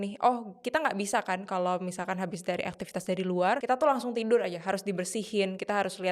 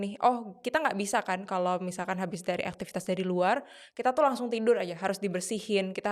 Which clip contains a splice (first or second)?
first